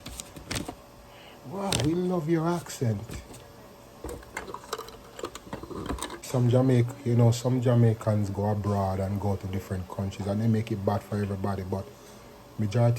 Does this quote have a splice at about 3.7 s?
no; 1 cut; at 6.2 s

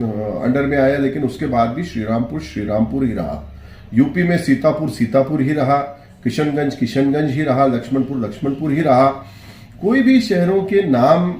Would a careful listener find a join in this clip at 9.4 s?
no; 0 cuts

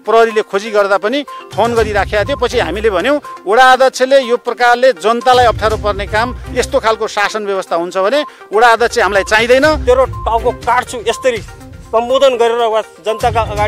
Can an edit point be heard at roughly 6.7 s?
no; 1 cut; at 9.8 s

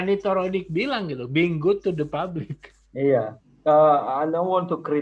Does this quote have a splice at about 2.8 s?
no; 0 cuts

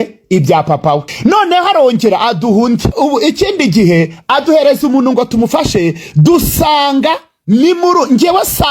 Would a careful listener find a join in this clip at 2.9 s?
yes; 2 cuts; at 1.1 s, 2.9 s

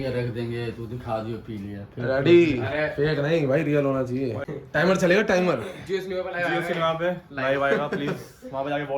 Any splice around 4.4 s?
yes; 1 cut; at 4.4 s

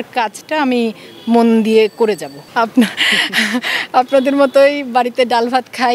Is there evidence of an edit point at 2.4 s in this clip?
yes; 1 cut; at 2.4 s

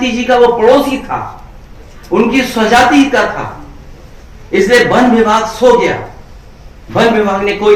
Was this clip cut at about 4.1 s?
no; 0 cuts

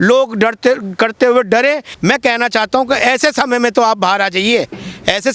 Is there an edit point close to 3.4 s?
no; 1 cut; at 1.9 s

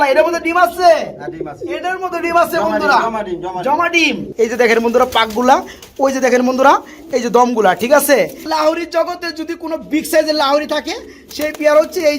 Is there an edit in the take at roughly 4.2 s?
yes; 2 cuts; at 4.2 s, 8.5 s

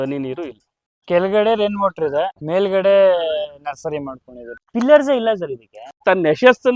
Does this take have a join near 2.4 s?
yes; 4 cuts; at 1.0 s, 2.4 s, 4.7 s, 6.0 s

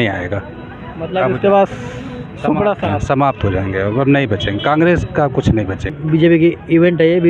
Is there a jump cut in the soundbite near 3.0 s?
no; 1 cut; at 6.0 s

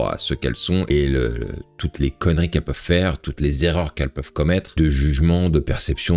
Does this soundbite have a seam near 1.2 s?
no; 0 cuts

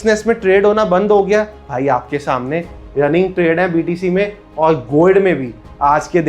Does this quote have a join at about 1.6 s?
no; 0 cuts

